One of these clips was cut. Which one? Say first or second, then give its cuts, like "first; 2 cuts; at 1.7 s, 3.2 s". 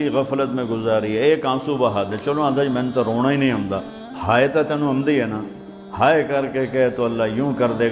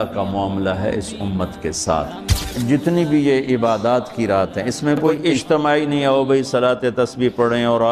second; 2 cuts; at 2.4 s, 5.3 s